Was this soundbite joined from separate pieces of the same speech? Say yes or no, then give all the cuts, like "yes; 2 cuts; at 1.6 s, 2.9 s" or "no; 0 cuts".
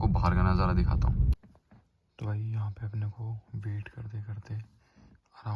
yes; 1 cut; at 1.3 s